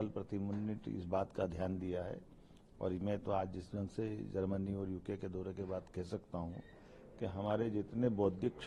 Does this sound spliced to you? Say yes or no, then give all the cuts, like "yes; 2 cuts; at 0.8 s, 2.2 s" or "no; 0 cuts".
no; 0 cuts